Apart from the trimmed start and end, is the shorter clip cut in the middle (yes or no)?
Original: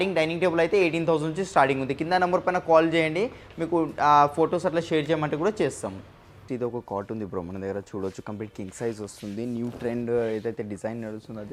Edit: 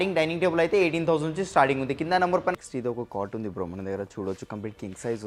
yes